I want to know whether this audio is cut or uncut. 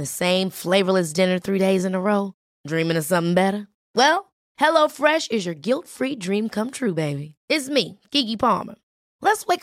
uncut